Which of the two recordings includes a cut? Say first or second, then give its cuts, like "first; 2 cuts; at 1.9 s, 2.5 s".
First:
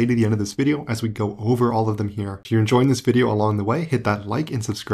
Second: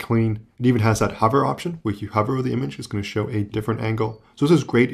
first; 1 cut; at 2.3 s